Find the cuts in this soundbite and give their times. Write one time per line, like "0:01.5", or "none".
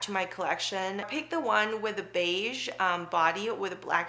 0:01.1